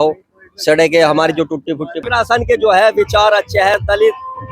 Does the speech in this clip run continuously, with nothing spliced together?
no; 1 cut; at 2.0 s

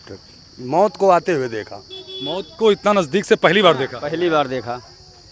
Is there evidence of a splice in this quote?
no; 0 cuts

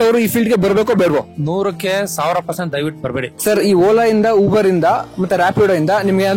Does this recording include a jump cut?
yes; 2 cuts; at 1.3 s, 3.3 s

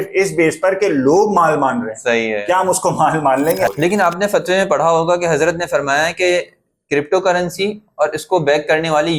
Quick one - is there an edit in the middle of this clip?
yes; 1 cut; at 3.7 s

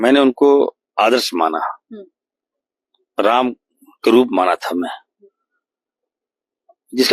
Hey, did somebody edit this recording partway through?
no; 0 cuts

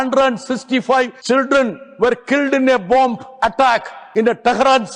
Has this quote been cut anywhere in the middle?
yes; 2 cuts; at 1.2 s, 4.0 s

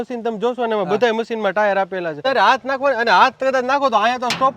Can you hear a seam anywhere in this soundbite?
yes; 1 cut; at 2.2 s

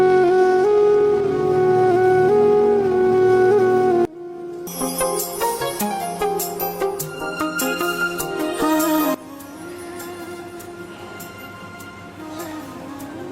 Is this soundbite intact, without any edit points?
no; 1 cut; at 4.7 s

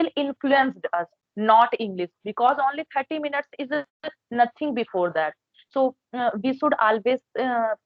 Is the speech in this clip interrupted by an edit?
no; 0 cuts

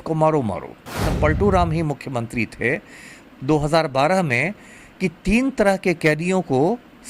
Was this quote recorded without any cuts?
no; 1 cut; at 1.1 s

